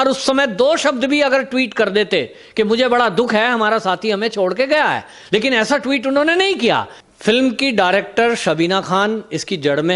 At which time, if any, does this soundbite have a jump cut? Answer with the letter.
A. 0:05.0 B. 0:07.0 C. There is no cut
B